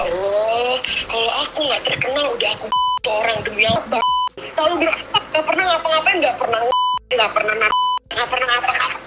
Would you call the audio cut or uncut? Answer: uncut